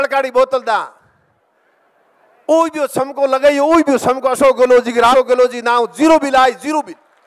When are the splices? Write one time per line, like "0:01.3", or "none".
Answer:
0:05.1